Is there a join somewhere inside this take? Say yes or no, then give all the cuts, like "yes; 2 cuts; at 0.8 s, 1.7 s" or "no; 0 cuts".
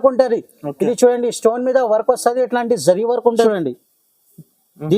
yes; 1 cut; at 3.4 s